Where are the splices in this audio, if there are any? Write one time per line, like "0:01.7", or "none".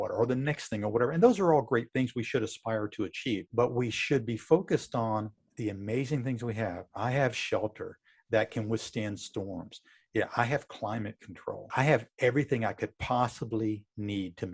0:03.5
0:11.7